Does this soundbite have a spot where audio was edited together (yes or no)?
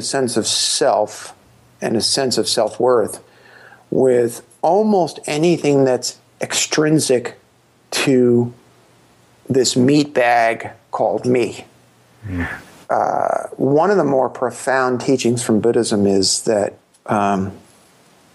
yes